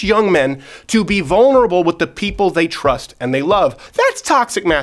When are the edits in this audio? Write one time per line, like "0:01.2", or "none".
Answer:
0:03.8